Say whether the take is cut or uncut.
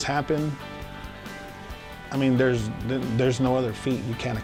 uncut